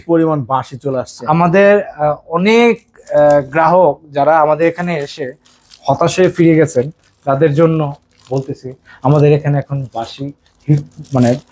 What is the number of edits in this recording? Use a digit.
0